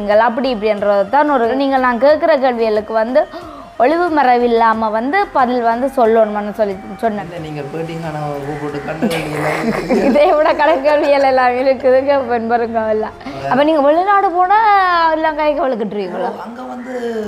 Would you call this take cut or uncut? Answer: cut